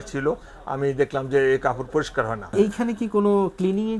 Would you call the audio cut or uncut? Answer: cut